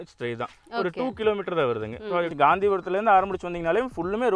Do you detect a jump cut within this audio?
yes; 1 cut; at 2.3 s

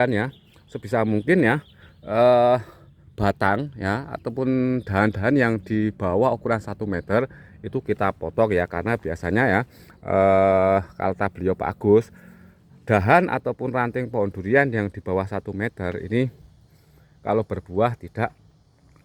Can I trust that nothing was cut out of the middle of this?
yes; 0 cuts

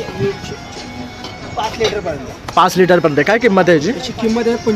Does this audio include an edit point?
no; 0 cuts

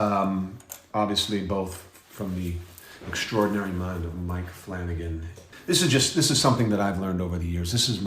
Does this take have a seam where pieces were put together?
yes; 1 cut; at 5.4 s

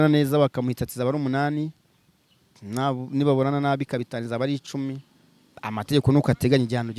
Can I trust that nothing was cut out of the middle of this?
yes; 0 cuts

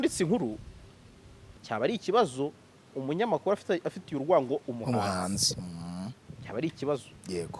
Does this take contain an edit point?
yes; 1 cut; at 1.6 s

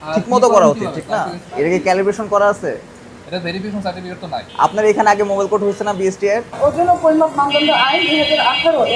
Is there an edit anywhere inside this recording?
yes; 3 cuts; at 1.4 s, 4.5 s, 6.6 s

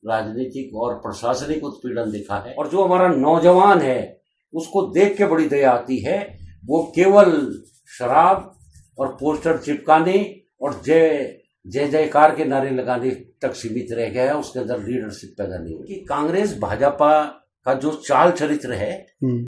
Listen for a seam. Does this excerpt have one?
yes; 2 cuts; at 2.6 s, 16.0 s

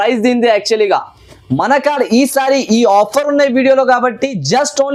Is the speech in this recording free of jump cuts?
yes; 0 cuts

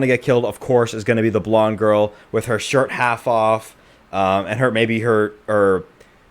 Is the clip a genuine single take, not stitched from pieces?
yes; 0 cuts

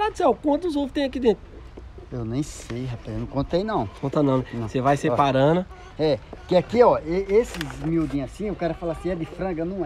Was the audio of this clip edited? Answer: no; 0 cuts

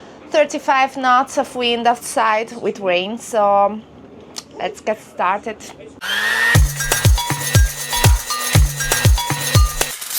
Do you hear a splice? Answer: no; 0 cuts

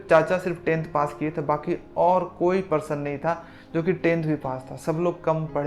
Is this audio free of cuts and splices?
yes; 0 cuts

